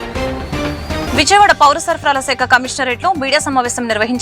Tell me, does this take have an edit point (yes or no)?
yes